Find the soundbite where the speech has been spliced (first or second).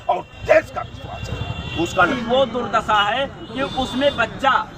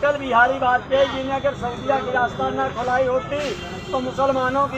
first